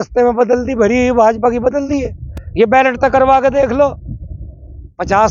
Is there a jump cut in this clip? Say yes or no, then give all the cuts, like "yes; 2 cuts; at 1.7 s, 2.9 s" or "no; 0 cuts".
no; 0 cuts